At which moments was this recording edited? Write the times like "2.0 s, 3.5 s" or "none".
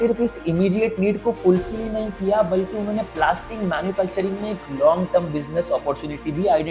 none